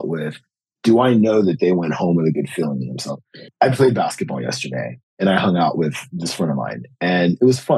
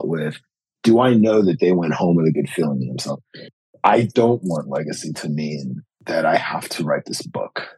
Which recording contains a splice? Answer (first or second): second